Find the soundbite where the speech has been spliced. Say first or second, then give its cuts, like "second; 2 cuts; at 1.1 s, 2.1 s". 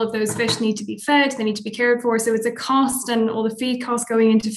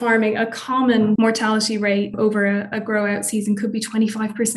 second; 2 cuts; at 1.2 s, 2.2 s